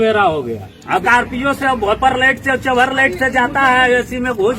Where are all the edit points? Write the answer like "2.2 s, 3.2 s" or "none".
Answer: 1.0 s